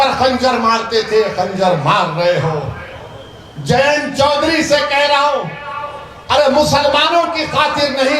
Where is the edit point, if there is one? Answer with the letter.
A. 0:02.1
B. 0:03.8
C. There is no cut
C